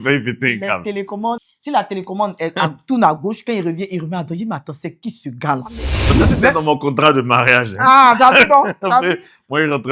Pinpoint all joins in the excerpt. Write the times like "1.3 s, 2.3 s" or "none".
1.4 s, 6.1 s